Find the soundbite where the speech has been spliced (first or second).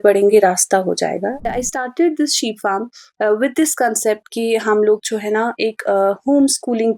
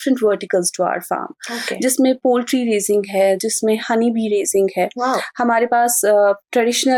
first